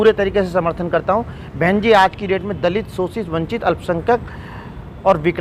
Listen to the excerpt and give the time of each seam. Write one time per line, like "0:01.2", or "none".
none